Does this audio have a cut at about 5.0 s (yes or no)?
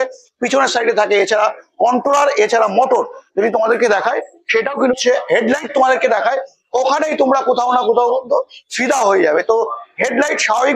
yes